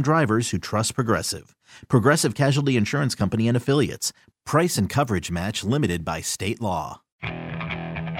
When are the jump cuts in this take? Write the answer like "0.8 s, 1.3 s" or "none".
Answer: 7.2 s

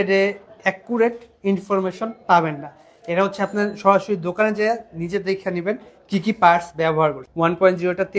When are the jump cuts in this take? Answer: 7.2 s

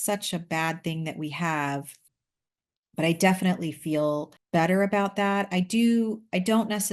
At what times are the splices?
2.0 s

